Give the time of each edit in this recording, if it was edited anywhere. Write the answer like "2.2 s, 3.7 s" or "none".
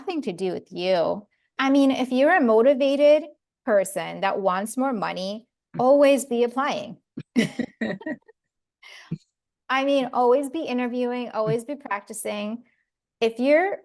1.5 s